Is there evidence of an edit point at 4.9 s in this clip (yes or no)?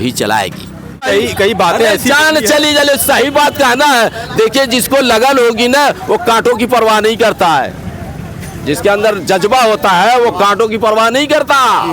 no